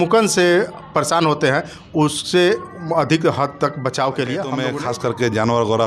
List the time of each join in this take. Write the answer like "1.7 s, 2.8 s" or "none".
4.7 s